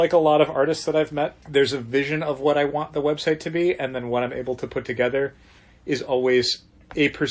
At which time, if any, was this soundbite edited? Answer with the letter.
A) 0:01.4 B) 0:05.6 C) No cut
A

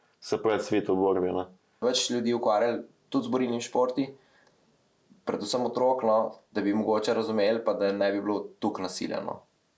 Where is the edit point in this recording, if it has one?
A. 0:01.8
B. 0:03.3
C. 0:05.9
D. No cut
A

